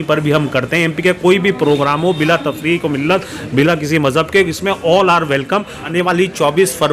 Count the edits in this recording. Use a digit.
1